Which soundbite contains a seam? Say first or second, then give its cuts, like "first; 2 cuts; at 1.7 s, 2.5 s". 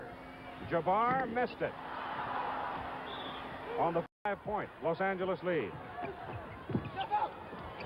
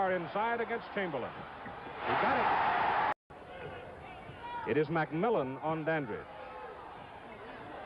second; 1 cut; at 6.5 s